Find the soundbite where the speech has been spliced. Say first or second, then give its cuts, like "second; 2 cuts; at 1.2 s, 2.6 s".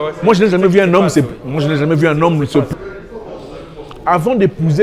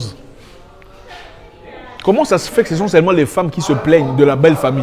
first; 1 cut; at 2.7 s